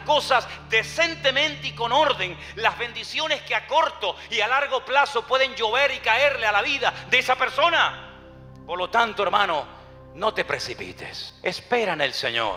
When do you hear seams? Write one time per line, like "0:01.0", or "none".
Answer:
none

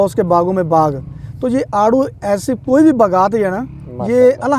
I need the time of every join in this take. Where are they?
none

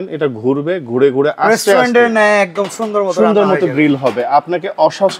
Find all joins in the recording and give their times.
none

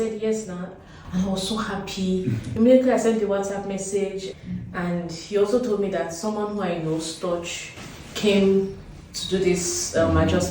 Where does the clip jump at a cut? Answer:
0:04.3

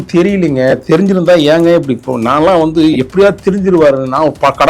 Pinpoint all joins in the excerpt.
none

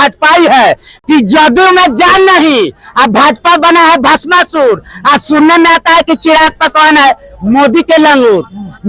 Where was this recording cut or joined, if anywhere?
none

